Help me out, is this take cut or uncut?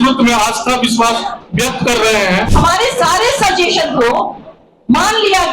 cut